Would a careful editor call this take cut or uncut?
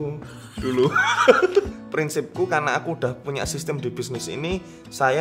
cut